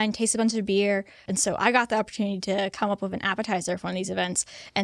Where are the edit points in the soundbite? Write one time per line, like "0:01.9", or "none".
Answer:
0:01.3